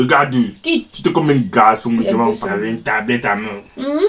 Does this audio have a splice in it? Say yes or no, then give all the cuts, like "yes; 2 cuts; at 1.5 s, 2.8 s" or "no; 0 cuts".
yes; 1 cut; at 2.2 s